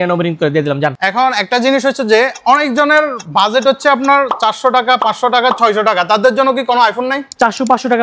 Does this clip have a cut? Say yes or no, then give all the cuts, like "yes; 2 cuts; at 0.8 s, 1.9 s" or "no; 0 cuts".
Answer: yes; 1 cut; at 1.0 s